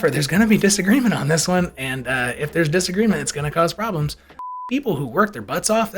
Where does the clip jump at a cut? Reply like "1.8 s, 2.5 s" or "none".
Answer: 4.6 s

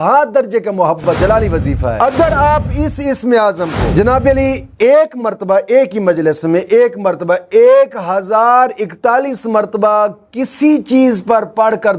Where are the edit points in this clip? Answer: 1.2 s

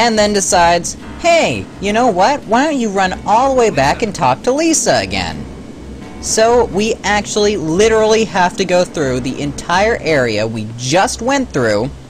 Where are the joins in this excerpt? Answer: 9.1 s

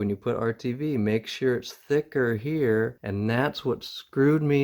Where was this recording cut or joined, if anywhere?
3.0 s

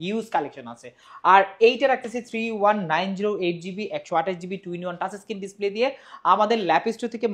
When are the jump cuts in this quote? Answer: none

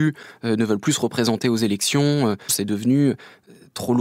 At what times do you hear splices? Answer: 2.6 s

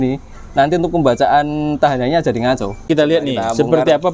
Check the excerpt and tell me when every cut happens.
2.9 s

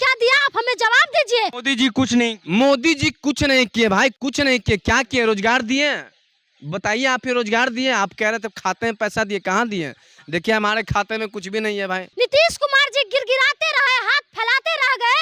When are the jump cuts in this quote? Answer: 1.6 s, 12.1 s

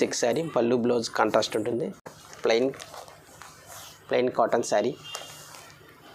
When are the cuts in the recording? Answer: 2.2 s

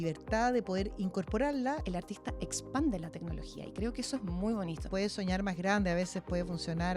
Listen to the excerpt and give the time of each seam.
1.8 s, 4.9 s

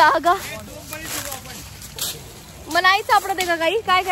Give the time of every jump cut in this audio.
none

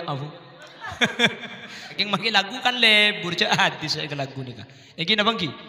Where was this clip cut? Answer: 1.9 s

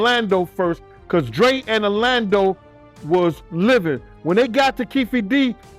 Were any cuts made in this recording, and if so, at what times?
none

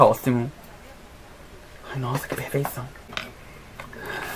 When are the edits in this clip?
3.1 s

